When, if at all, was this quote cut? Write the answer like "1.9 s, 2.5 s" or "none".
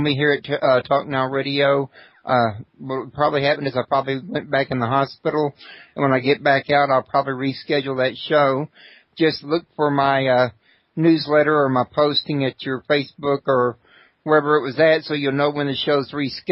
none